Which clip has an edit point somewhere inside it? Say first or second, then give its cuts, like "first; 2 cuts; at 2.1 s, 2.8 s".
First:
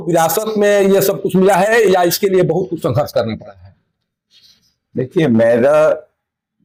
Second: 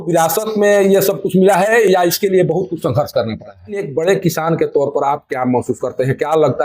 second; 1 cut; at 3.9 s